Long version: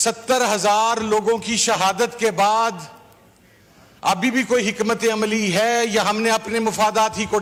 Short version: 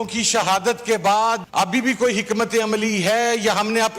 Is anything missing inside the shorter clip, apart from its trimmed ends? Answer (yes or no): yes